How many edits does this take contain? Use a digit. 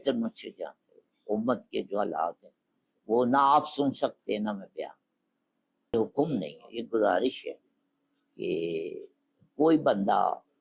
1